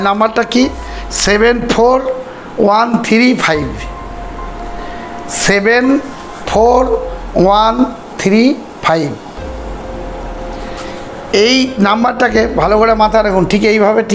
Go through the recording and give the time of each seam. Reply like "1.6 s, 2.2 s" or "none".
none